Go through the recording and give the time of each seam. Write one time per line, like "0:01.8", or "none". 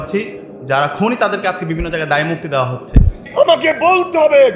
0:03.2